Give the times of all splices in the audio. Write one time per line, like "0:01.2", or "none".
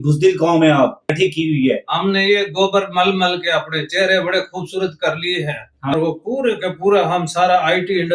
0:01.1
0:05.9